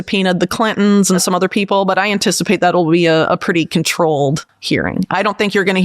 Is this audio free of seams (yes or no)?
no